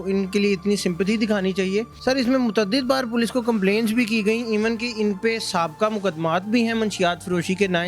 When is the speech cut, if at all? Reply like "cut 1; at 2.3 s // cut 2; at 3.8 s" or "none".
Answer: cut 1; at 1.9 s